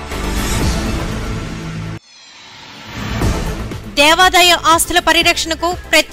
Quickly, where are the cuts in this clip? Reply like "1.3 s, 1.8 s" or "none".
1.8 s, 3.7 s